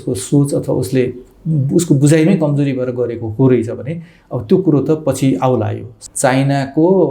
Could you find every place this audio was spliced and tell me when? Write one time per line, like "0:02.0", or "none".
0:05.9